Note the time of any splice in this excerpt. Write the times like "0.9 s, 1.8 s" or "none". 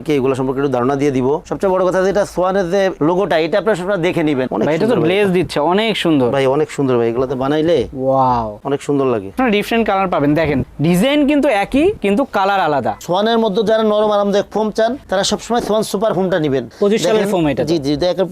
1.5 s, 4.5 s, 9.4 s, 13.0 s, 16.7 s